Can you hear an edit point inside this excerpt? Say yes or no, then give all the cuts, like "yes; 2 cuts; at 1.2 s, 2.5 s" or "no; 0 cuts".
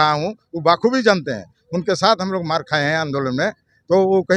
no; 0 cuts